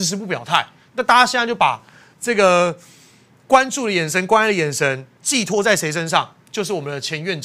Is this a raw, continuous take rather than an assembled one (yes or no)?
yes